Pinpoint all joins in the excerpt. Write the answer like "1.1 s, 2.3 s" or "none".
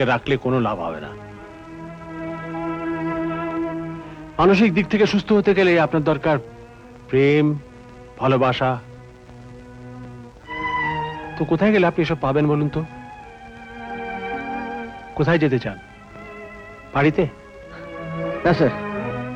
none